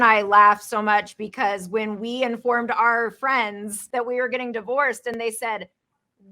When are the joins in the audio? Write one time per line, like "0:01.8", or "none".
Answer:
0:03.7